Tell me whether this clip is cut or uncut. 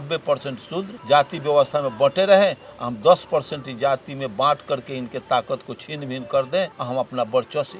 cut